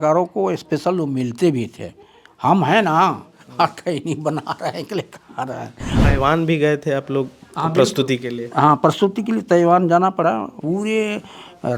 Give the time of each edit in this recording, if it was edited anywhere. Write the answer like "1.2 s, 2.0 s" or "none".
6.0 s, 10.6 s